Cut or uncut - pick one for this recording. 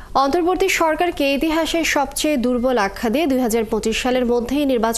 uncut